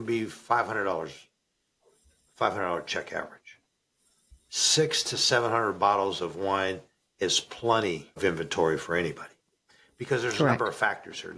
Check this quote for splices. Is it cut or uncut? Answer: uncut